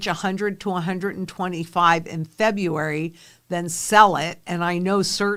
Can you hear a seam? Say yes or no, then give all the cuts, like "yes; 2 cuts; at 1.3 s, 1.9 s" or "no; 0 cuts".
no; 0 cuts